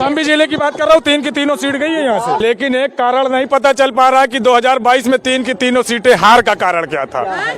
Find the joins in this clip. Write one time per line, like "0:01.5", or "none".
0:02.4